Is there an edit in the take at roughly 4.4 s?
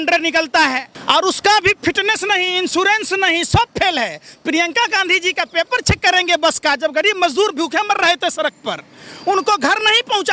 no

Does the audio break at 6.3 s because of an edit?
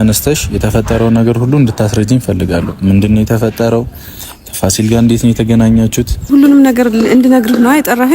yes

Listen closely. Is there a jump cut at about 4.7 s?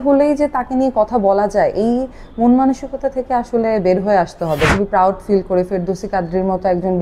yes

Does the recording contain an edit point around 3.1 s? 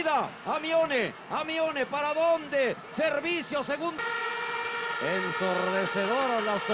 yes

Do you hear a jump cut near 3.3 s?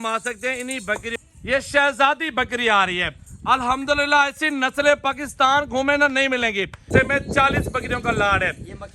no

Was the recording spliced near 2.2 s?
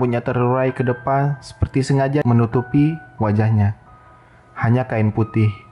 yes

